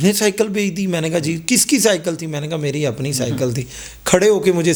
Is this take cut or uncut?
uncut